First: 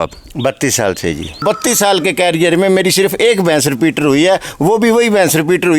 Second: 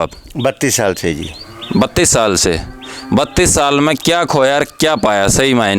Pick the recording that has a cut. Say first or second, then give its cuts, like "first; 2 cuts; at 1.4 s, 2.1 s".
first; 1 cut; at 1.4 s